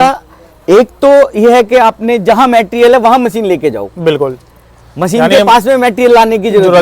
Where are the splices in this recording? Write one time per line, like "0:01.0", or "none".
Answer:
none